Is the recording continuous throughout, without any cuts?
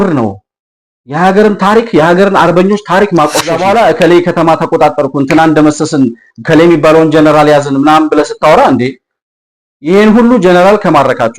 no; 1 cut; at 3.5 s

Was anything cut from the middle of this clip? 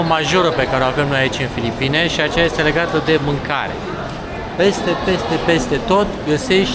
no; 0 cuts

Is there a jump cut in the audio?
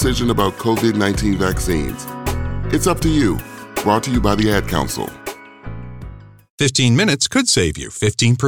yes; 1 cut; at 6.5 s

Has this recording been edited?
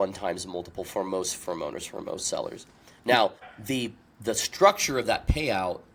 no; 0 cuts

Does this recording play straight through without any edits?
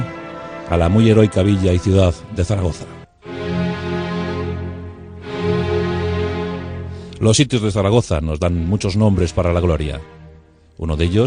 yes; 0 cuts

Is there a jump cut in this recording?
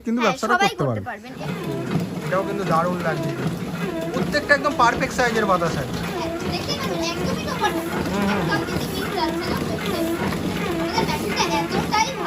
yes; 1 cut; at 1.3 s

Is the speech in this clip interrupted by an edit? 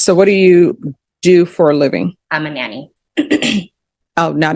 yes; 1 cut; at 2.2 s

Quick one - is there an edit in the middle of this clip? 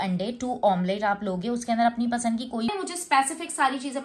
yes; 1 cut; at 2.7 s

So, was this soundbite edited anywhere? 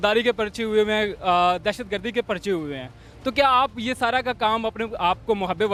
no; 0 cuts

